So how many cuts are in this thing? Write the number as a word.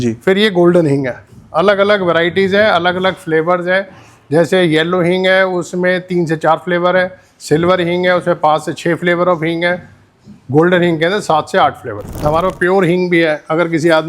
one